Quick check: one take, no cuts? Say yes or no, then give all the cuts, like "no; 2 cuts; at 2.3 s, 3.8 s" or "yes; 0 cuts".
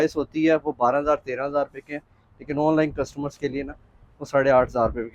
yes; 0 cuts